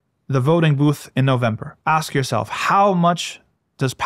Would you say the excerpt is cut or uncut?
cut